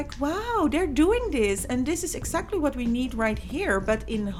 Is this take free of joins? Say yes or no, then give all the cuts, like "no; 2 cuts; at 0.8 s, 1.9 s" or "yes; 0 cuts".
yes; 0 cuts